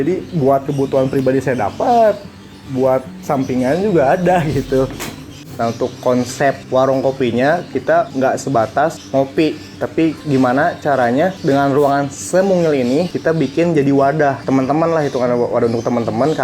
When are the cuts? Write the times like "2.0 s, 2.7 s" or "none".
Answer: 5.5 s, 14.4 s